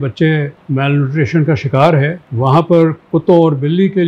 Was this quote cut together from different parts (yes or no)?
no